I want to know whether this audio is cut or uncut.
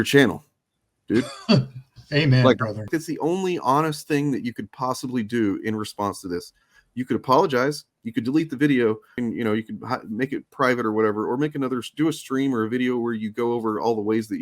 cut